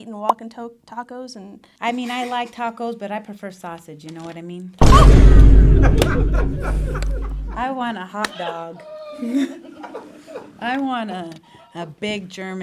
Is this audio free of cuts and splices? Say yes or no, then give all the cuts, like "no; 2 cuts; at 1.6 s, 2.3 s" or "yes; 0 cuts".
no; 1 cut; at 1.7 s